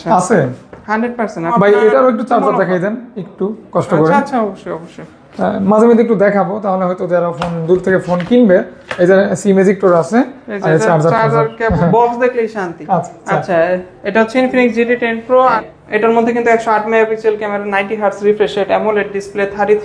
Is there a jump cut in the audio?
yes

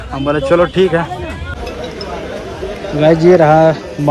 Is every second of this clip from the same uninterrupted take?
no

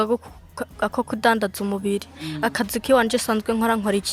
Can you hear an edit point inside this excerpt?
no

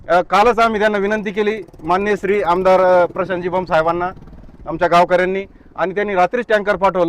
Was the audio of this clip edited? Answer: no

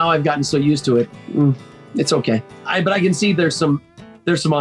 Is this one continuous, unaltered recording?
no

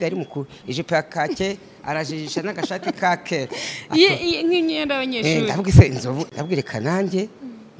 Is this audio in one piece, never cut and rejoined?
no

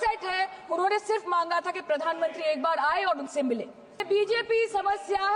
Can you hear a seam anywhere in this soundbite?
yes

